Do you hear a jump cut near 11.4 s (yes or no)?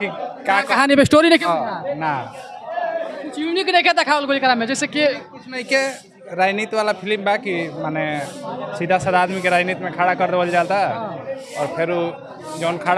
no